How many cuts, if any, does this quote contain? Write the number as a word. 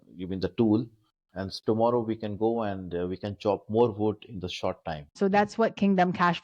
one